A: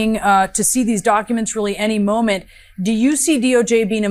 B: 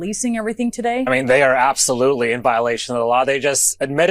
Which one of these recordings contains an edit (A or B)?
B